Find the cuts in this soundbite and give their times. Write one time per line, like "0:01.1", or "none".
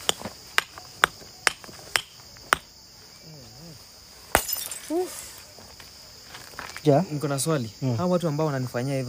0:06.8